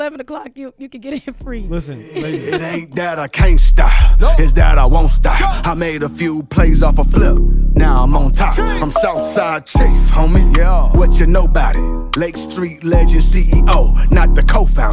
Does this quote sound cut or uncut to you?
cut